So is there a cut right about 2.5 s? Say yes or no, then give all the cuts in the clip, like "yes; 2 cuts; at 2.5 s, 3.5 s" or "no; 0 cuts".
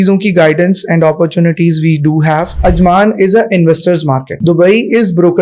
yes; 2 cuts; at 2.5 s, 4.3 s